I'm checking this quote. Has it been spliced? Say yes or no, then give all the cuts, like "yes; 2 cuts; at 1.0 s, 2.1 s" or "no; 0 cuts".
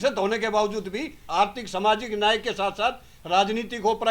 yes; 1 cut; at 1.2 s